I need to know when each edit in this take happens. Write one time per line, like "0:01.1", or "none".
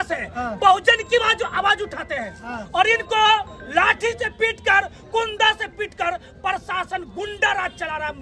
none